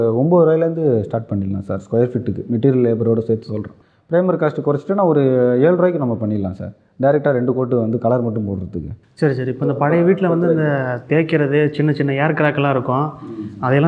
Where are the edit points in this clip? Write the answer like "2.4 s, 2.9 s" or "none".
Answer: 3.8 s, 9.0 s